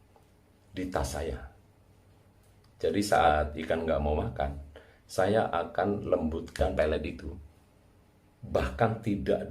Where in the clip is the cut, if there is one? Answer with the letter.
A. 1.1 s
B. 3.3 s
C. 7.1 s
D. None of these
B